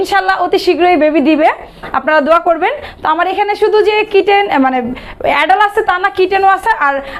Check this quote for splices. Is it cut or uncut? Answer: uncut